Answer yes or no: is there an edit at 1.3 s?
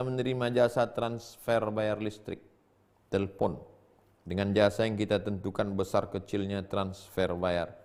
no